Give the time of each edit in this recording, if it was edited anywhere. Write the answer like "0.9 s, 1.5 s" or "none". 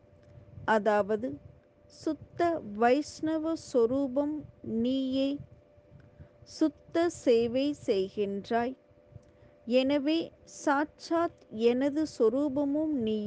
8.6 s